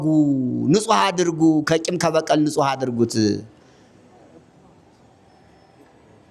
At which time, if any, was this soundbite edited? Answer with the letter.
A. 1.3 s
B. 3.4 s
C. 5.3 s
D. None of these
D